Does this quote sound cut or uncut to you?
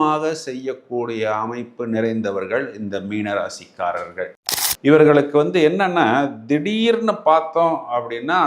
cut